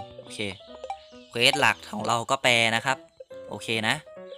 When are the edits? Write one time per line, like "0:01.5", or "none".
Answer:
none